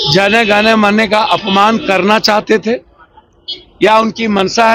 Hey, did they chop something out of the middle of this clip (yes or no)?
no